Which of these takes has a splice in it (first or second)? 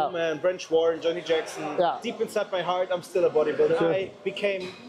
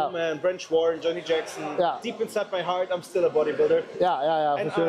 first